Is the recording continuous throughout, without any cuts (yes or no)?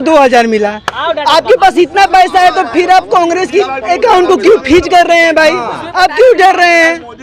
yes